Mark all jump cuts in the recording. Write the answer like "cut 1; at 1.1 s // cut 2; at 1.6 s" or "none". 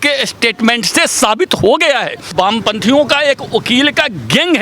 cut 1; at 2.3 s